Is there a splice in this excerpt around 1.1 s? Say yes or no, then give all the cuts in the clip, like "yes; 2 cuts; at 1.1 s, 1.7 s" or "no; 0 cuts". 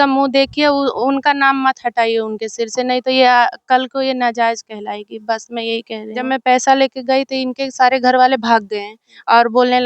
no; 1 cut; at 6.2 s